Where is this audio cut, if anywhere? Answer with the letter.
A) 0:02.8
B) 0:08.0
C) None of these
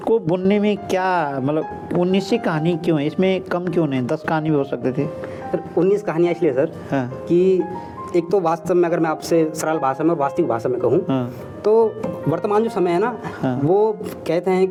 C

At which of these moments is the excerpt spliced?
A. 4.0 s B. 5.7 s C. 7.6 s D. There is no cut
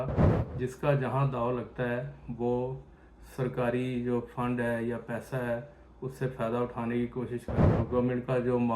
C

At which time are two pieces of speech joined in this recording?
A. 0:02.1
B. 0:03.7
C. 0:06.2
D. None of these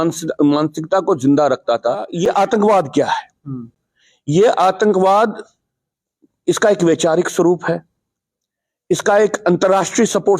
A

